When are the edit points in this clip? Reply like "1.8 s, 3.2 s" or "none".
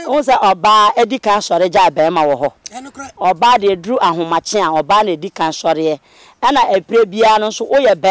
none